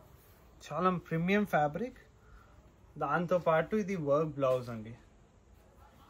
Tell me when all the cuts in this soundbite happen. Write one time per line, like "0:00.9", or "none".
none